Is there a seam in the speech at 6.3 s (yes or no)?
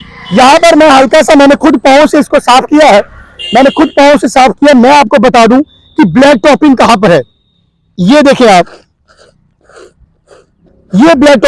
no